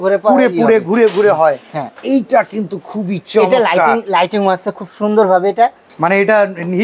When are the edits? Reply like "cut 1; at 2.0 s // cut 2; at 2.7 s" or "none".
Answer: cut 1; at 2.0 s // cut 2; at 5.9 s

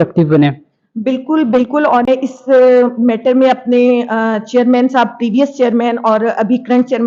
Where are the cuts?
cut 1; at 2.1 s

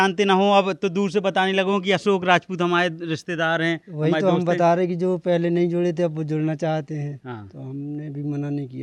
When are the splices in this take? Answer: none

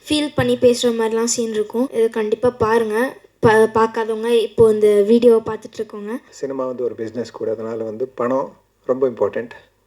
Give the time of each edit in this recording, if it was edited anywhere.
cut 1; at 1.9 s // cut 2; at 6.3 s

